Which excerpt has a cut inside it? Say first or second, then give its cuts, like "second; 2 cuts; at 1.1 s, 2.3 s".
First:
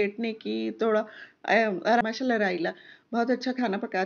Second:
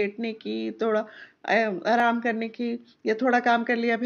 first; 1 cut; at 2.0 s